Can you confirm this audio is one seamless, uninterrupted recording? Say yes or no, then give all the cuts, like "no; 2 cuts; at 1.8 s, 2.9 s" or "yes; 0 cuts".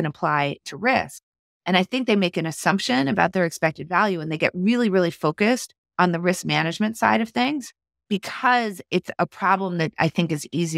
no; 3 cuts; at 5.8 s, 7.9 s, 9.1 s